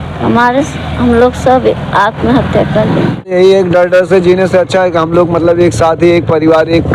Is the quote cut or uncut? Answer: cut